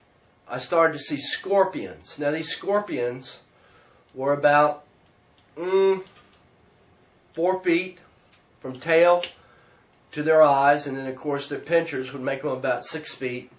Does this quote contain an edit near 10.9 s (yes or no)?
no